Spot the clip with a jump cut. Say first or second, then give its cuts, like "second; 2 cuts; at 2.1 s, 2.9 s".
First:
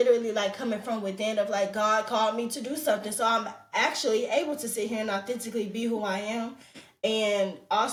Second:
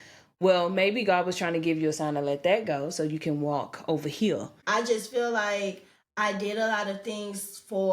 second; 1 cut; at 4.5 s